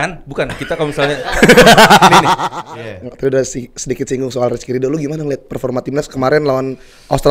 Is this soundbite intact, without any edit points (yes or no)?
no